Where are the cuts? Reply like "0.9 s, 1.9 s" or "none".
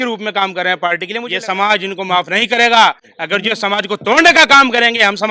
1.2 s